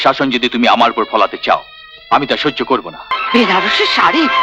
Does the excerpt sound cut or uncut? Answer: cut